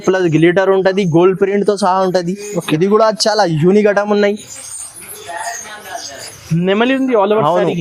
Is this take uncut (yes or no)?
yes